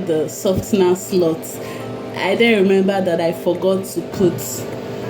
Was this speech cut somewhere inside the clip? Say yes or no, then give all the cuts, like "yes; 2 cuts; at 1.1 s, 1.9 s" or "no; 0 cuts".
no; 0 cuts